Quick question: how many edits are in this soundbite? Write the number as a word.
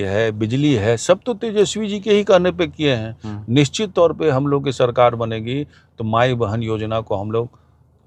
zero